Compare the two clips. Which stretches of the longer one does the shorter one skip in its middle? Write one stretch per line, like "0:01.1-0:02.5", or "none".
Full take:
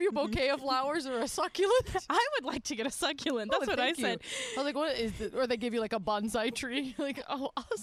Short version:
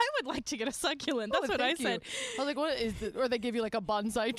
none